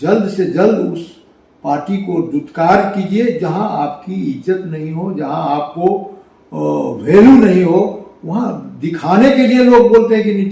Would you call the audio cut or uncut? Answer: uncut